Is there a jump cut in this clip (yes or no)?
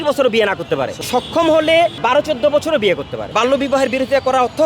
yes